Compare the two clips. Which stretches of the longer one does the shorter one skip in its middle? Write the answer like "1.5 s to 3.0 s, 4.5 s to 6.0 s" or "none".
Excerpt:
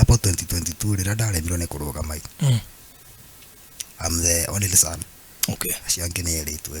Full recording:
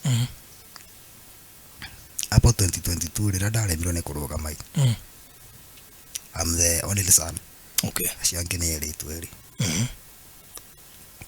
none